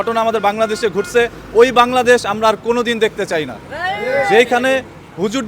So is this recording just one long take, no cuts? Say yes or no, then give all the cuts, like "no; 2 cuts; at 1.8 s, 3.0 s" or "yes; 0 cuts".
yes; 0 cuts